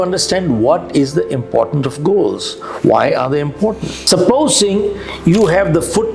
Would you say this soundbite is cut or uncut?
cut